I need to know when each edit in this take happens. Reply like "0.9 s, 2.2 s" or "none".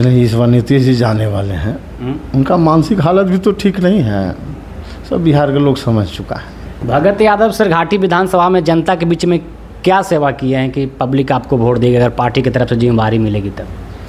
none